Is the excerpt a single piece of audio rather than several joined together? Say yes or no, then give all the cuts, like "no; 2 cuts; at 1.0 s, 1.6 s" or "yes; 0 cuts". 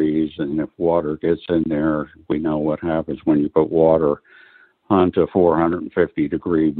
yes; 0 cuts